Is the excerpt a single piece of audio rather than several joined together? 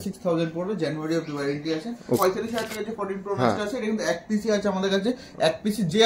no; 1 cut; at 2.2 s

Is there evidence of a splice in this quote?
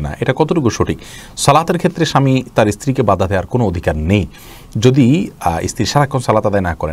no; 0 cuts

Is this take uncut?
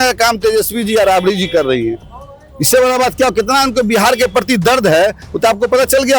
yes; 0 cuts

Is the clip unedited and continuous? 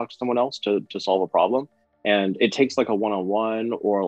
yes; 0 cuts

